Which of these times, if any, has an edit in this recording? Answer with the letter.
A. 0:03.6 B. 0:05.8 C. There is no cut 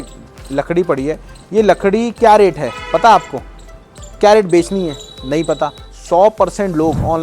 B